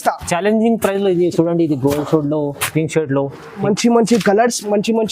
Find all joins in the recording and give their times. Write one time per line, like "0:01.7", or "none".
0:03.6